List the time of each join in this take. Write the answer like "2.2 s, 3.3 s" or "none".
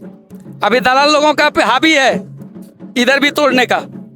none